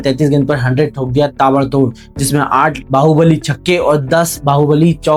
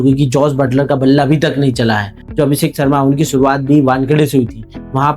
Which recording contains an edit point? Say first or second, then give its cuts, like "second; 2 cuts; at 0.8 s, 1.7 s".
second; 1 cut; at 2.1 s